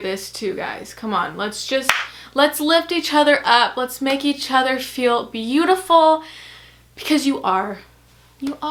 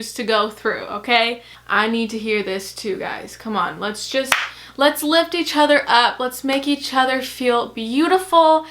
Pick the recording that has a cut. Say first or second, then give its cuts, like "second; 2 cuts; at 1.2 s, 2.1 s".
second; 1 cut; at 1.5 s